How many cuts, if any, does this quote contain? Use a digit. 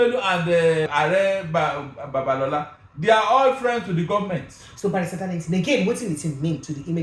1